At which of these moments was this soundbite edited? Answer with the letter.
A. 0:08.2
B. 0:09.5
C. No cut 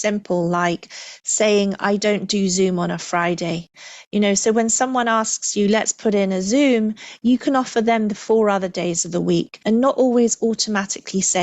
B